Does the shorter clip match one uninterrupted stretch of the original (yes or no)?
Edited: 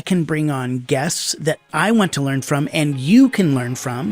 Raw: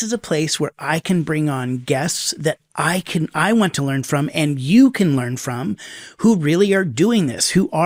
no